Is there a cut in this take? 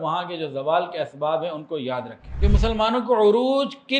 yes; 1 cut; at 2.2 s

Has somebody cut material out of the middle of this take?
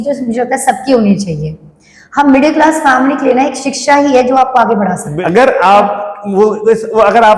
yes; 1 cut; at 5.0 s

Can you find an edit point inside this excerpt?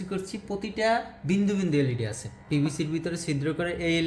no; 0 cuts

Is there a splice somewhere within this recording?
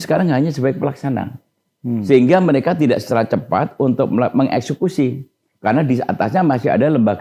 no; 0 cuts

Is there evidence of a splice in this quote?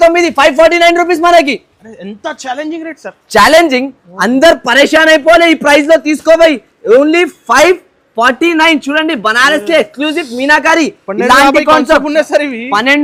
no; 0 cuts

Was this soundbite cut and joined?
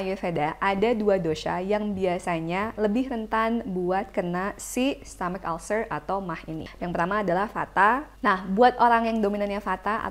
yes; 2 cuts; at 6.7 s, 8.1 s

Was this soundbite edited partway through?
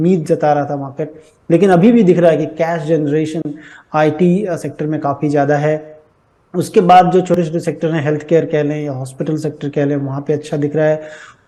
no; 0 cuts

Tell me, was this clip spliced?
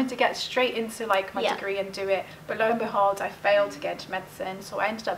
yes; 1 cut; at 2.4 s

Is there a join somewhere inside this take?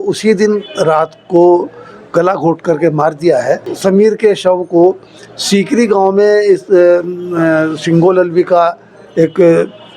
yes; 1 cut; at 3.7 s

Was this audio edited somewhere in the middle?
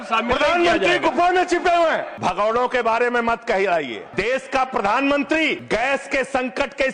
yes; 3 cuts; at 2.1 s, 4.0 s, 5.6 s

